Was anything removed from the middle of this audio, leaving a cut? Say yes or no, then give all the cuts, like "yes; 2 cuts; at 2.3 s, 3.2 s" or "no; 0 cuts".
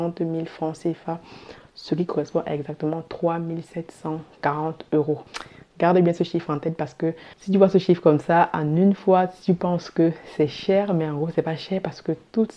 no; 0 cuts